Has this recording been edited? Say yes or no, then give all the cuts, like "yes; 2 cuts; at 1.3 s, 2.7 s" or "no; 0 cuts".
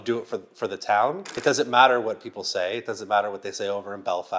yes; 1 cut; at 1.3 s